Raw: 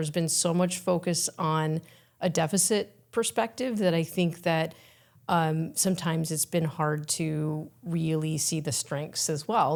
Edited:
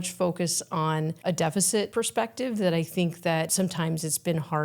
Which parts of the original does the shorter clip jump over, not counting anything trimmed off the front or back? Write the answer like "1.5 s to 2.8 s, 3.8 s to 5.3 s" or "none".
1.8 s to 2.1 s, 2.9 s to 3.1 s, 4.7 s to 5.8 s